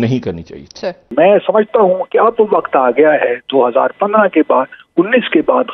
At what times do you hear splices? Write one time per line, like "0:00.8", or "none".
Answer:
0:01.1